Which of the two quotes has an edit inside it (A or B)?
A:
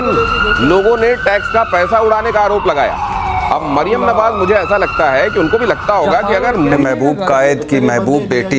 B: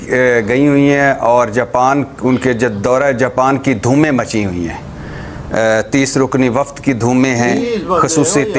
A